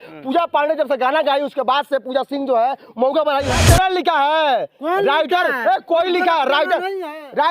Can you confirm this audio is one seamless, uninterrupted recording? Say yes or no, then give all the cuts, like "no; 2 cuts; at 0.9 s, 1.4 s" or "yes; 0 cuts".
no; 1 cut; at 3.6 s